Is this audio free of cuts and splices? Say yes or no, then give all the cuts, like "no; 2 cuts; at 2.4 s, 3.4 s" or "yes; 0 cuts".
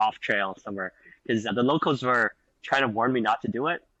yes; 0 cuts